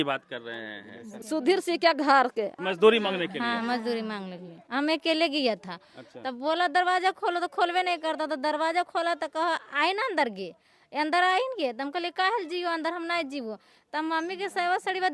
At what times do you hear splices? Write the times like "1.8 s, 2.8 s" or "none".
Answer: 1.1 s, 2.6 s, 4.6 s